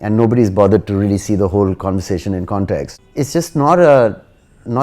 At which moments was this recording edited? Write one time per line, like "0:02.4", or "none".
0:03.0